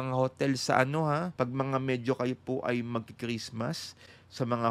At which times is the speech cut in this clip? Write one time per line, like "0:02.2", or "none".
0:01.3